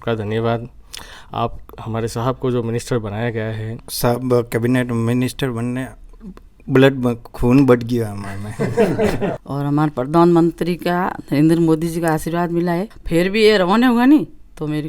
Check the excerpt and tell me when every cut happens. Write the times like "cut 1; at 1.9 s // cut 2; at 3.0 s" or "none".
cut 1; at 3.8 s // cut 2; at 9.4 s // cut 3; at 12.9 s